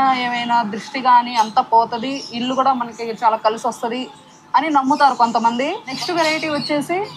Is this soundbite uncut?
no; 1 cut; at 5.9 s

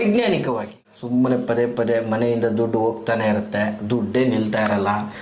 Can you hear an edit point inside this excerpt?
yes; 1 cut; at 0.9 s

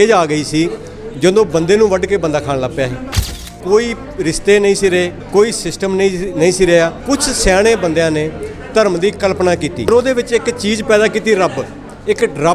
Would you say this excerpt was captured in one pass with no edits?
no; 4 cuts; at 3.5 s, 5.2 s, 7.0 s, 9.9 s

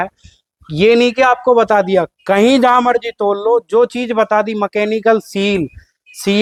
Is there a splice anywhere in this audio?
no; 0 cuts

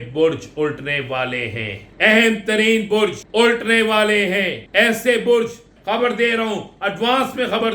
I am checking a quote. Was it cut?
yes; 4 cuts; at 1.8 s, 3.2 s, 4.6 s, 5.7 s

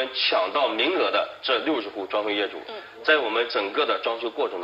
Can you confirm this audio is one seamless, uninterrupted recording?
yes; 0 cuts

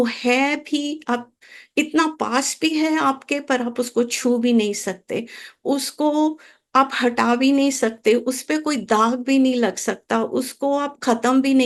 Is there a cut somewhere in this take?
no; 0 cuts

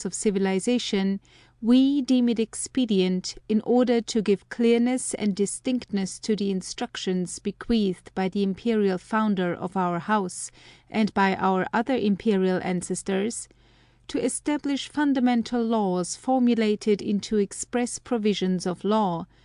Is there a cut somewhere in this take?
no; 0 cuts

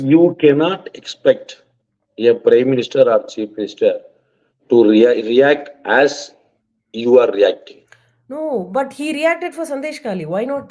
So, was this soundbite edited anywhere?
no; 0 cuts

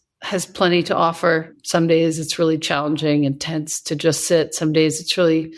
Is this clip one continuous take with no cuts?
no; 1 cut; at 1.5 s

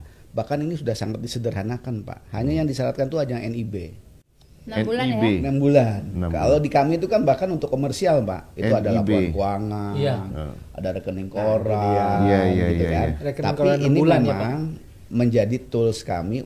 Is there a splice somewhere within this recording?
no; 0 cuts

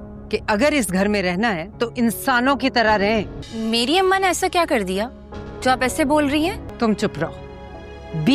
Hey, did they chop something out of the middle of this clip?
yes; 2 cuts; at 3.4 s, 6.7 s

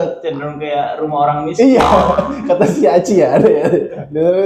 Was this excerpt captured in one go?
yes; 0 cuts

